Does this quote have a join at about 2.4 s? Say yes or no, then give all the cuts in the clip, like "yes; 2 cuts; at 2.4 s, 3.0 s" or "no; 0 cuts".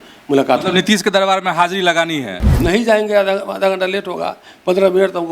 yes; 1 cut; at 2.4 s